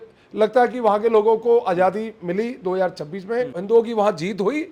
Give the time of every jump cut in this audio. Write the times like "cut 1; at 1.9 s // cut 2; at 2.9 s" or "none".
cut 1; at 3.6 s